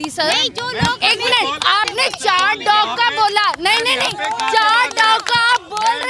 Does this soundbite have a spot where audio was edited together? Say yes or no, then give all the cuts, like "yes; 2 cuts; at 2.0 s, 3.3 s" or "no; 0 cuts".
no; 0 cuts